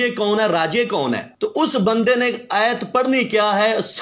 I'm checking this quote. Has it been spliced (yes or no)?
no